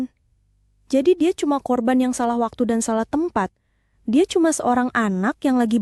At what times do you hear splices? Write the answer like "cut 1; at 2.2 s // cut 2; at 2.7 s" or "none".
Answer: none